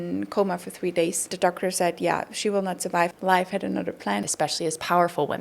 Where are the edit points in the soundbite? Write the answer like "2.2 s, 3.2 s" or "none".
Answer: 1.3 s, 3.2 s, 4.2 s